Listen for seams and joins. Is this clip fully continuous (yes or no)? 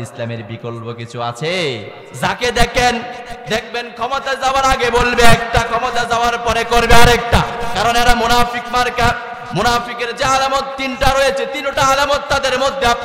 no